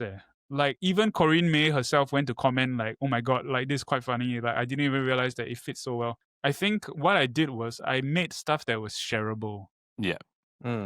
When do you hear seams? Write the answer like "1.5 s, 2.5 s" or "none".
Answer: 6.3 s